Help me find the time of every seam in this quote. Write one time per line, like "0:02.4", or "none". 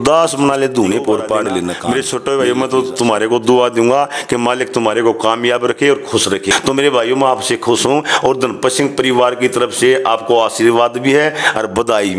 0:01.8
0:06.5